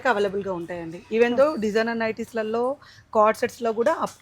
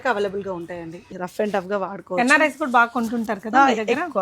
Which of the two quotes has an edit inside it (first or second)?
second